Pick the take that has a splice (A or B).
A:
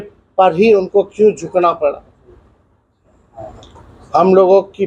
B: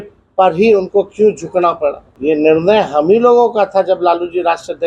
B